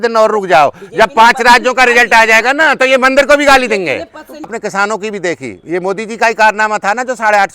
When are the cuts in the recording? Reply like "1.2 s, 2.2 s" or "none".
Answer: 4.5 s

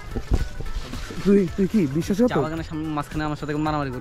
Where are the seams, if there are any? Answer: none

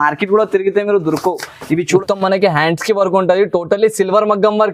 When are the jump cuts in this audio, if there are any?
2.0 s

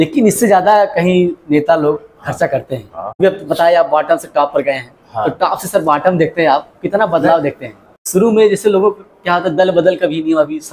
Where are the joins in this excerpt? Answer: 3.2 s, 8.0 s

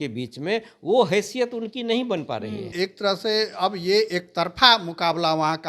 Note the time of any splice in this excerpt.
2.7 s

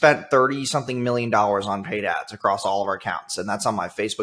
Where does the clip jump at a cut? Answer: none

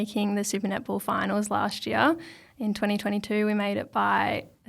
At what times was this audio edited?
none

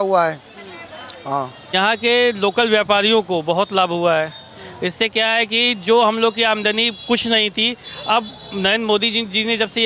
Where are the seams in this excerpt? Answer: 1.7 s

